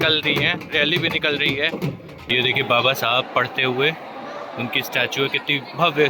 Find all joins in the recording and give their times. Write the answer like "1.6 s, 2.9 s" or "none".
2.3 s